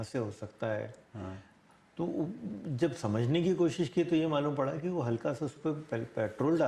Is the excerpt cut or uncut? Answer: uncut